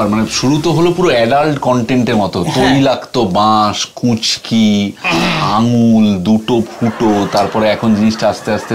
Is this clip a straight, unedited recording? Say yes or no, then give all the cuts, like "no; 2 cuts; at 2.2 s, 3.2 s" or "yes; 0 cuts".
yes; 0 cuts